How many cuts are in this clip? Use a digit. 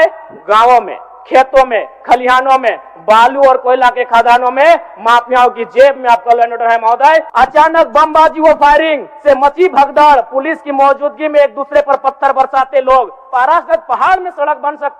2